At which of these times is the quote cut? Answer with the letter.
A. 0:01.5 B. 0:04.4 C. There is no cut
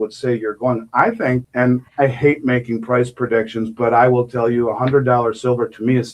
A